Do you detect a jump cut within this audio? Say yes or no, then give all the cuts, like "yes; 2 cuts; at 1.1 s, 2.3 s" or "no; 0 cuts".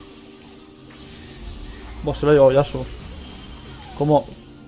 no; 0 cuts